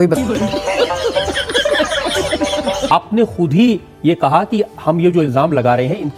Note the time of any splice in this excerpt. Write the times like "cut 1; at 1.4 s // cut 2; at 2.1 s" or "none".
cut 1; at 2.9 s